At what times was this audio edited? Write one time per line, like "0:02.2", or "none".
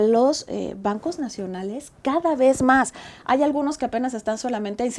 none